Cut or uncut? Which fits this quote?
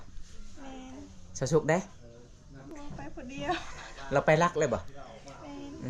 cut